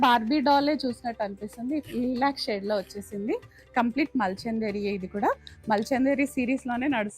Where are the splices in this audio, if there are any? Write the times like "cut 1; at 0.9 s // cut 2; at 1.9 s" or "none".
cut 1; at 1.9 s